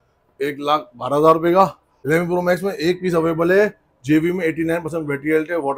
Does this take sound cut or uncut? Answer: cut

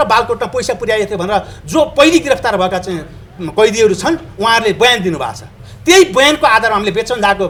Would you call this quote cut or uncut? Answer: uncut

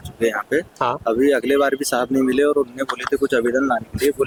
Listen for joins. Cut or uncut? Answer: uncut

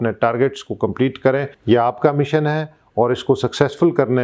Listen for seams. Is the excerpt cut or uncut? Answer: cut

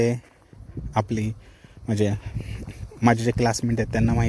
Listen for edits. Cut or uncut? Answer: uncut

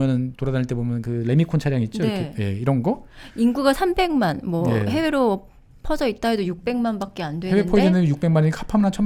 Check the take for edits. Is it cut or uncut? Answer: uncut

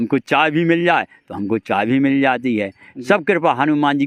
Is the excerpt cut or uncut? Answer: uncut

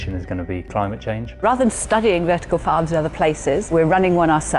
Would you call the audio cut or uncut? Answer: cut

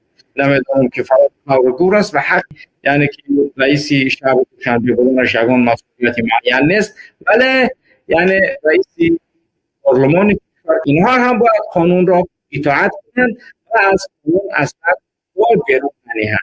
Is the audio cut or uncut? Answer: cut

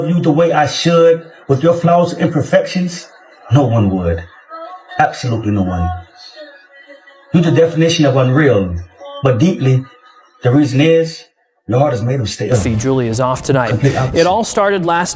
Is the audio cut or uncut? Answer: cut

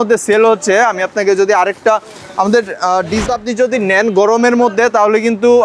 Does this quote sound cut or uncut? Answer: cut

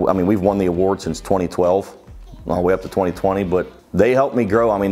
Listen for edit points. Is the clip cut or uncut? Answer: uncut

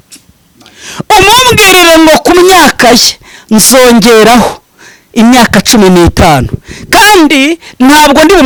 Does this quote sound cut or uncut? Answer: uncut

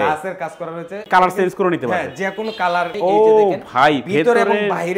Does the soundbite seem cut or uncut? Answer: cut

